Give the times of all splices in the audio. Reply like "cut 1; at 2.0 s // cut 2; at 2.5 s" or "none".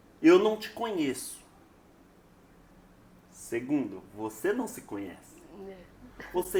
none